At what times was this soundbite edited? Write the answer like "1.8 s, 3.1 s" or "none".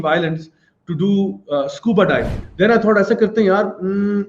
2.4 s

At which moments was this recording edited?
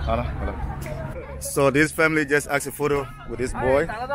1.1 s

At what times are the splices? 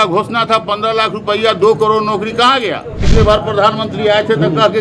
3.0 s

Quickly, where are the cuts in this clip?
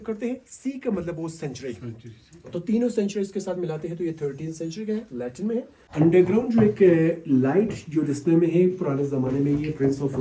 5.8 s

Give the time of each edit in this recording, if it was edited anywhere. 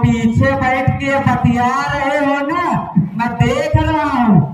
none

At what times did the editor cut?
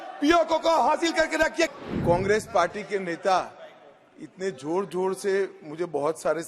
1.7 s

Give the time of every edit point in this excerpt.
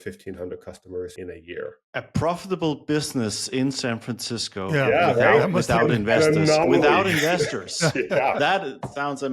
1.5 s

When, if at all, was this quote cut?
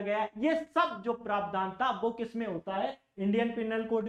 none

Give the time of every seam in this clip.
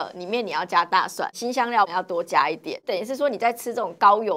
1.9 s, 2.8 s

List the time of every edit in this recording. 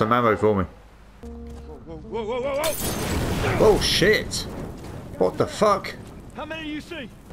1.2 s

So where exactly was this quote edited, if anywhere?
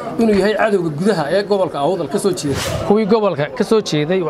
2.7 s

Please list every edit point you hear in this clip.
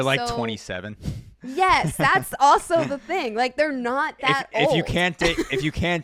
none

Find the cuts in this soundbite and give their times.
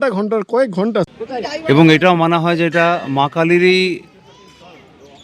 1.1 s

